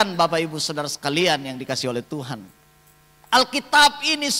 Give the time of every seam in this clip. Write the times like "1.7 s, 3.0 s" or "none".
none